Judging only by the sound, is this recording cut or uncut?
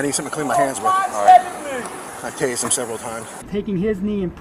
cut